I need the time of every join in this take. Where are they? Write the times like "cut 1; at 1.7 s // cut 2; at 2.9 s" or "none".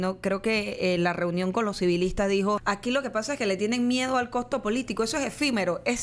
cut 1; at 2.6 s